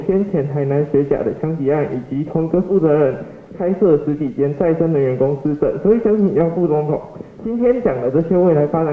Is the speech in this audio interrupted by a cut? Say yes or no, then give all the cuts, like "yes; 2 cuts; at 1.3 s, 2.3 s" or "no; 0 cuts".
no; 0 cuts